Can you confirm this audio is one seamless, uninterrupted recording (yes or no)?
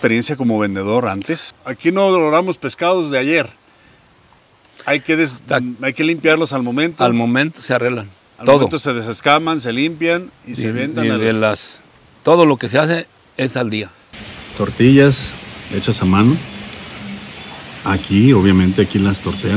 no